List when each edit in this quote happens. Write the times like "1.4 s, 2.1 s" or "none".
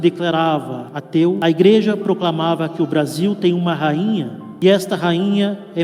1.1 s, 4.4 s